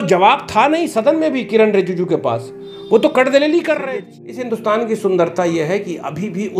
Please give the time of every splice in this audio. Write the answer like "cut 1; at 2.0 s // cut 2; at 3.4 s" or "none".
cut 1; at 3.8 s